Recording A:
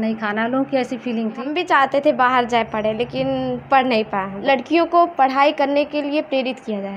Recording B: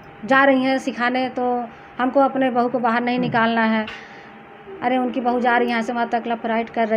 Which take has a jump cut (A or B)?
A